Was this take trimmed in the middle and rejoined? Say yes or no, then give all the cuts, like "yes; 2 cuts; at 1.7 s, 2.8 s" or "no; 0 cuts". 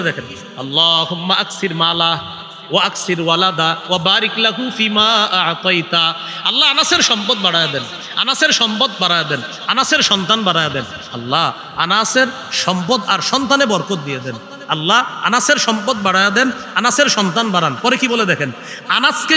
no; 0 cuts